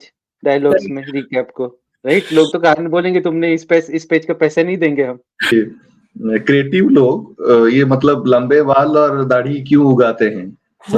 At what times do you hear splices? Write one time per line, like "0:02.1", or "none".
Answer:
0:05.5

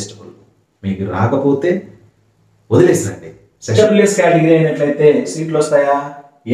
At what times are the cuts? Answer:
0:03.7

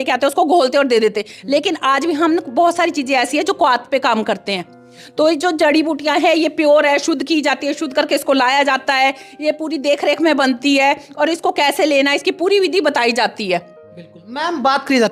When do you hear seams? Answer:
none

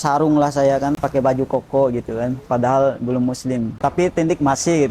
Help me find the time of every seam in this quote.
0:01.0
0:03.8

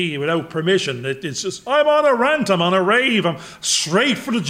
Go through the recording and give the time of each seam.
none

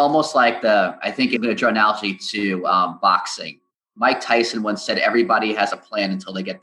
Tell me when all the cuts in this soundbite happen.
0:01.4

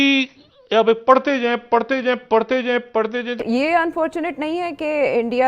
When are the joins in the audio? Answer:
0:03.4

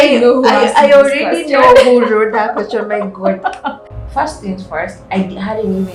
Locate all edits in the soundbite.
0:03.9

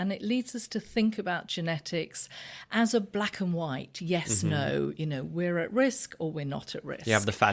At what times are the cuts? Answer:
none

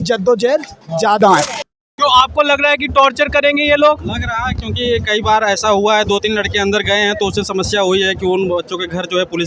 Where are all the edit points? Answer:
0:01.6

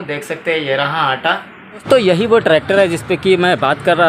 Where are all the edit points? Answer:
0:01.8

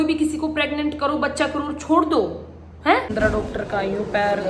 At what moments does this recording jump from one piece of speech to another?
0:03.1

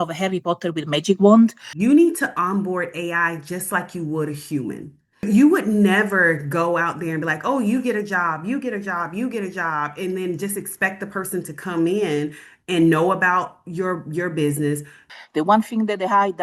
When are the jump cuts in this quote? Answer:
0:01.7
0:05.2
0:15.1

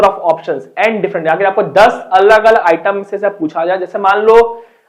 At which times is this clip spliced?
none

